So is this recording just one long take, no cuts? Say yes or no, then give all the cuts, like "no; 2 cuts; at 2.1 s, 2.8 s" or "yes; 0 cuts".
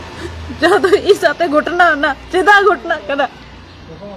yes; 0 cuts